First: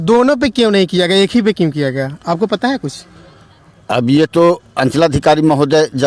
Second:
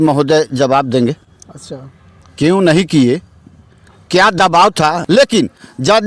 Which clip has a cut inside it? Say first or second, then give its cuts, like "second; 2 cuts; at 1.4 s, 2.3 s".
second; 1 cut; at 5.0 s